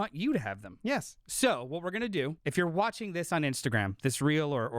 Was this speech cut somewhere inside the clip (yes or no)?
yes